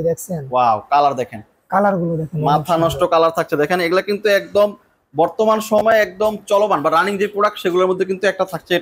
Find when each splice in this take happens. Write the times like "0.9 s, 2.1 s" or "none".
none

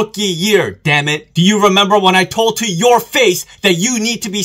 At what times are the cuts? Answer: 1.2 s

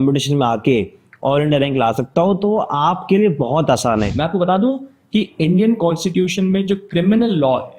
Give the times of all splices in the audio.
4.1 s

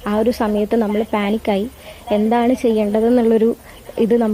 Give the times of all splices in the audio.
none

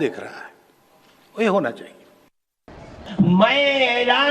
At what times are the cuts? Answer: 2.6 s

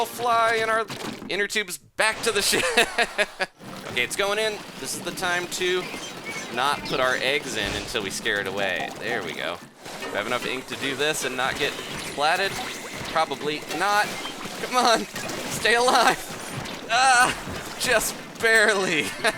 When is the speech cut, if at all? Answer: 3.7 s, 9.8 s

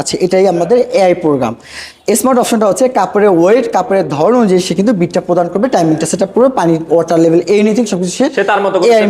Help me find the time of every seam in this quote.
none

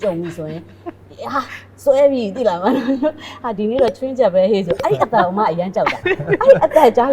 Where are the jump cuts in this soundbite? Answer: none

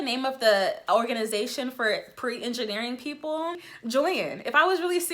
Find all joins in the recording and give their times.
3.7 s

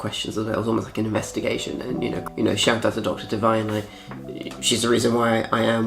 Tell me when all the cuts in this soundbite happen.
2.2 s

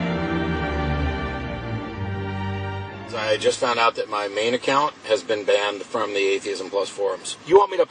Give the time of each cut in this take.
none

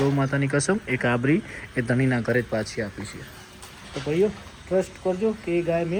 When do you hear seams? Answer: none

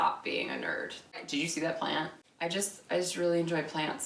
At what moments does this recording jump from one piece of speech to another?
1.2 s, 2.2 s

